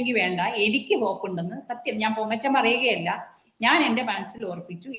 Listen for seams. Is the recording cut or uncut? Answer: uncut